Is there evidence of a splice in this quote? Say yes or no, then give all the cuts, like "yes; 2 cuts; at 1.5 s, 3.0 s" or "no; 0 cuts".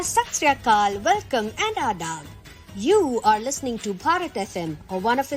no; 0 cuts